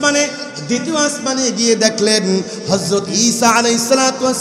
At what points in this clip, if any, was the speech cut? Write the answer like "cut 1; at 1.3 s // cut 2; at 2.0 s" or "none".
none

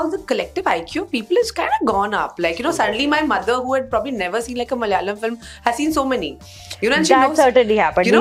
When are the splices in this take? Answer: none

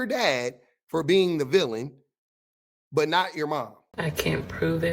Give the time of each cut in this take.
cut 1; at 3.8 s

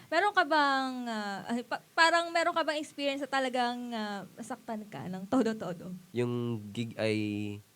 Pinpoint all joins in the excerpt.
cut 1; at 5.9 s

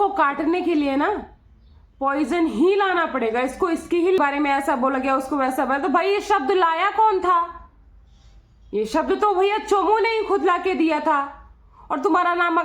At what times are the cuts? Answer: cut 1; at 4.2 s

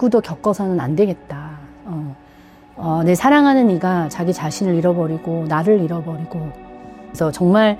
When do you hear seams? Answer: none

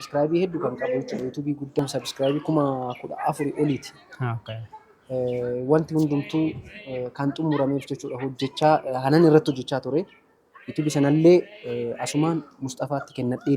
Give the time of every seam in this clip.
cut 1; at 1.8 s

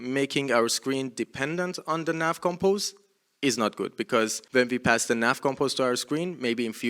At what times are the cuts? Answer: cut 1; at 4.4 s

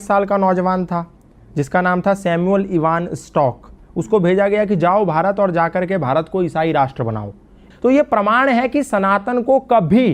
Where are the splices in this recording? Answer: cut 1; at 7.6 s

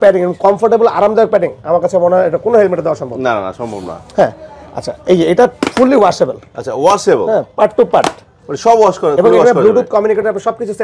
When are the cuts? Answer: none

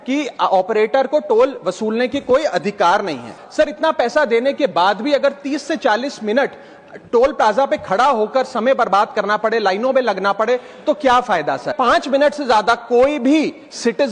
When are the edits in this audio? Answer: cut 1; at 3.4 s // cut 2; at 11.7 s

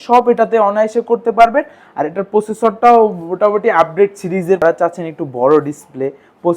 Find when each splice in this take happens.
cut 1; at 4.6 s

